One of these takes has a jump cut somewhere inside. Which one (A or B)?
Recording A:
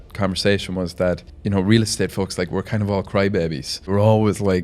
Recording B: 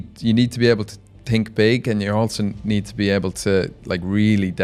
A